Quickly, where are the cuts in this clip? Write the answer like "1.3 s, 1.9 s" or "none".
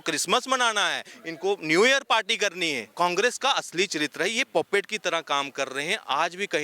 2.9 s